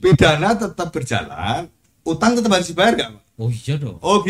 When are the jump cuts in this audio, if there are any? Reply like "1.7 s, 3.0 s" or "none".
none